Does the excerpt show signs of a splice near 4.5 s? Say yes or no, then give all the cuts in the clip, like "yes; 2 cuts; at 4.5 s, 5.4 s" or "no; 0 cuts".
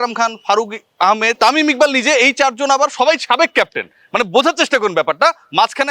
no; 1 cut; at 1.3 s